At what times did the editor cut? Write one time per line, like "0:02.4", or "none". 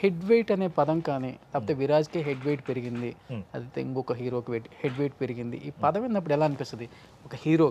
none